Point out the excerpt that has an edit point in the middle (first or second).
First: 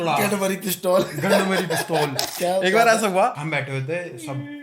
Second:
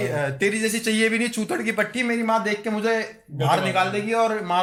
first